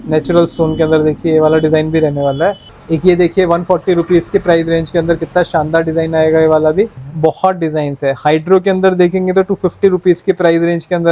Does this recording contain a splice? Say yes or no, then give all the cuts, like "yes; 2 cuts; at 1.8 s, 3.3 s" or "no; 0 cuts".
yes; 2 cuts; at 2.6 s, 7.0 s